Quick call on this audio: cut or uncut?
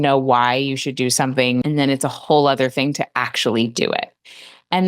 cut